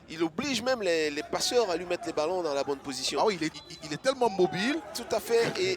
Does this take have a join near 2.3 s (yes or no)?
no